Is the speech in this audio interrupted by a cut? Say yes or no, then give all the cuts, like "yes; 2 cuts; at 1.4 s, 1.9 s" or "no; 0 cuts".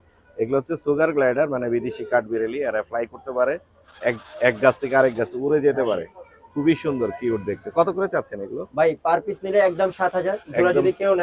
no; 0 cuts